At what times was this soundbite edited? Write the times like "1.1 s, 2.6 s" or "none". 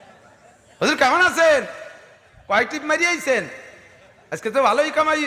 none